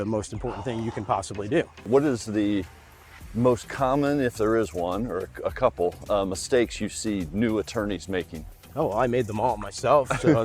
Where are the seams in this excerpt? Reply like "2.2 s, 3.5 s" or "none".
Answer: 1.8 s